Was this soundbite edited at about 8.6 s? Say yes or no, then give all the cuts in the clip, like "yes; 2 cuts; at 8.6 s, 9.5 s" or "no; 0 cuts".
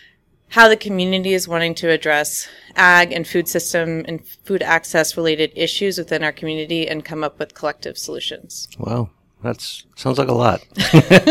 no; 0 cuts